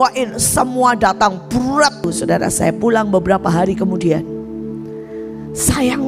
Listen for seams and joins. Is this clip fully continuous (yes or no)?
no